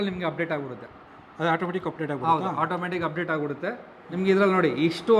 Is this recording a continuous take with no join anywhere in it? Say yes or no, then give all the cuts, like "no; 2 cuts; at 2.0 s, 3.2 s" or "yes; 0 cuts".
yes; 0 cuts